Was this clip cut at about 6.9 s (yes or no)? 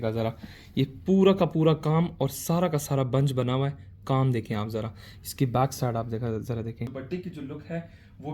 yes